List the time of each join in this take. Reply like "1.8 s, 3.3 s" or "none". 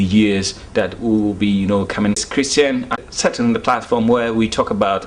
2.2 s, 3.0 s

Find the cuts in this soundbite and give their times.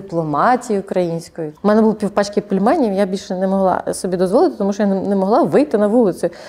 1.5 s

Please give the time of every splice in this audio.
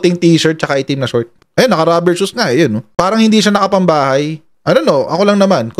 1.3 s, 2.8 s

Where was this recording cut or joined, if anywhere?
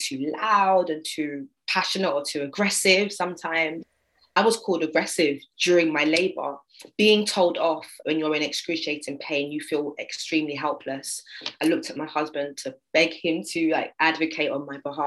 4.4 s, 7.9 s

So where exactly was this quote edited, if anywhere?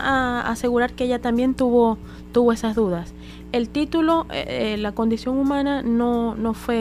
none

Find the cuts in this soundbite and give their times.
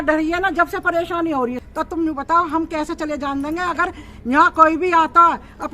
1.7 s

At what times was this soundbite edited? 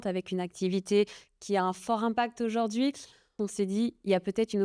3.4 s

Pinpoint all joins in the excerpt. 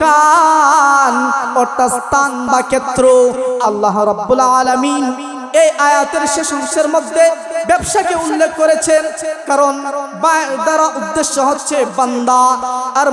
3.6 s

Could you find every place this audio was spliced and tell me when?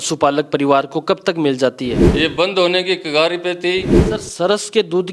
2.0 s, 4.0 s

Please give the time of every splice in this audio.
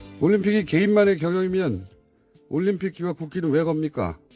1.2 s

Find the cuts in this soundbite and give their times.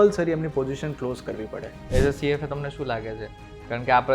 1.8 s

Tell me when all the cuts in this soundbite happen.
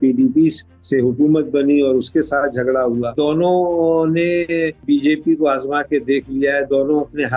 3.1 s, 4.8 s

